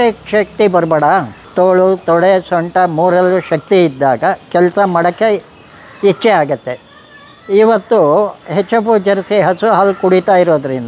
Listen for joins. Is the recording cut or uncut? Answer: cut